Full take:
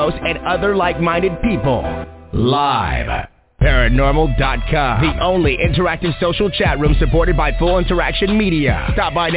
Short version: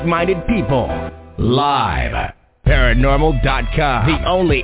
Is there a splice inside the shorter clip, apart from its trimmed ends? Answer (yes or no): no